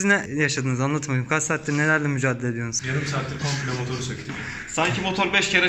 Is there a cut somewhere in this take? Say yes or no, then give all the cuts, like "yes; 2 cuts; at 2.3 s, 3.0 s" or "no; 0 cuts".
no; 0 cuts